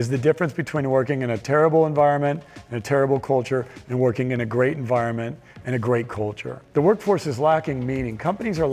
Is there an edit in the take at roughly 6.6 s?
yes; 1 cut; at 6.6 s

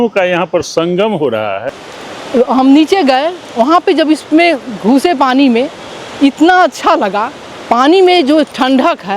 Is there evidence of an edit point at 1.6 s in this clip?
yes; 1 cut; at 1.6 s

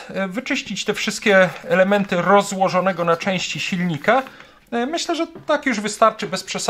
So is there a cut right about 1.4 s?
no; 1 cut; at 4.6 s

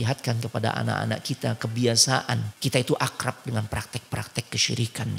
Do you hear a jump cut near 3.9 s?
no; 1 cut; at 2.5 s

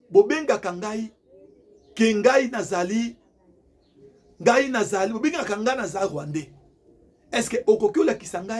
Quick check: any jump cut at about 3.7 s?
no; 0 cuts

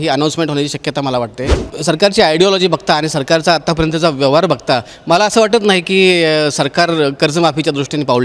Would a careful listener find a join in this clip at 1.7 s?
yes; 1 cut; at 1.7 s

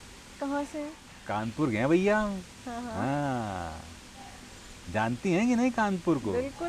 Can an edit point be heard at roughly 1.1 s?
yes; 1 cut; at 1.1 s

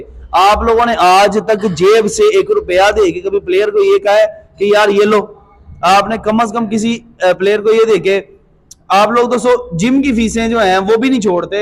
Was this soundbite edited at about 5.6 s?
no; 0 cuts

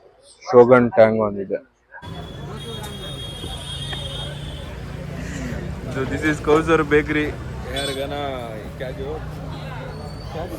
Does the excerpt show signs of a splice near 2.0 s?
yes; 1 cut; at 2.0 s

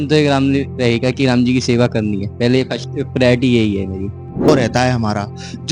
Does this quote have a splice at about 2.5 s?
no; 1 cut; at 4.5 s

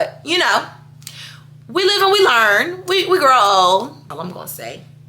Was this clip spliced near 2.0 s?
no; 1 cut; at 4.0 s

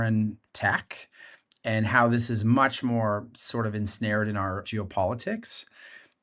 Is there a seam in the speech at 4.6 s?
yes; 1 cut; at 4.6 s

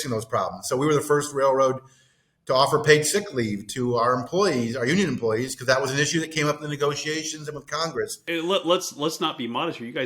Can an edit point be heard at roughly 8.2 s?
yes; 1 cut; at 8.2 s

